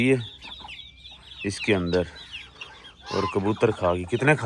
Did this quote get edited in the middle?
no; 0 cuts

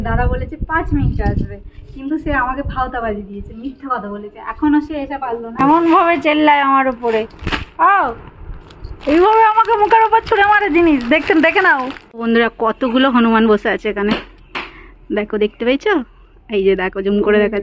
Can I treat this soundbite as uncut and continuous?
no; 2 cuts; at 5.4 s, 12.1 s

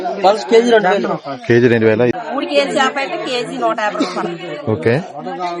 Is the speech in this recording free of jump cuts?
no; 1 cut; at 2.1 s

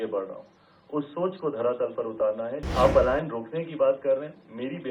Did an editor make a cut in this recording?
yes; 1 cut; at 2.6 s

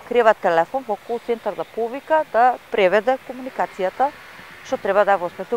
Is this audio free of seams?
yes; 0 cuts

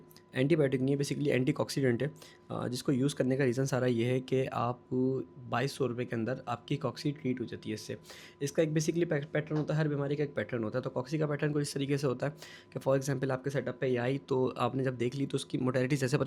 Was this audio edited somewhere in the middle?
no; 0 cuts

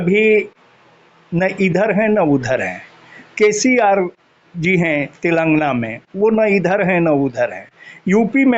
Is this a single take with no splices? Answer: yes; 0 cuts

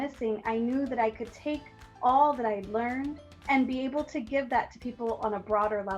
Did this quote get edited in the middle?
yes; 1 cut; at 3.3 s

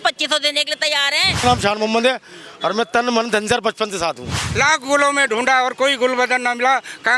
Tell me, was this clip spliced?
yes; 2 cuts; at 1.4 s, 4.4 s

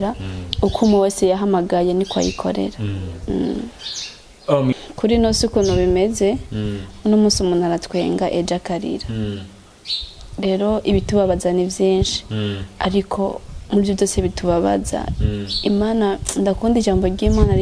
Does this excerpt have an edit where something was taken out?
yes; 1 cut; at 4.7 s

